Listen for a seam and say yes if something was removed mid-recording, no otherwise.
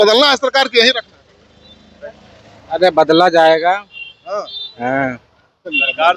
no